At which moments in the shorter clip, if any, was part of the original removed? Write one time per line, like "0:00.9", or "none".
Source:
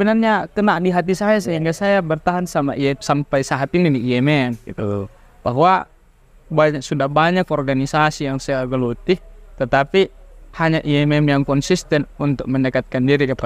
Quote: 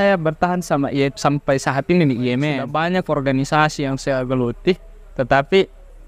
0:02.6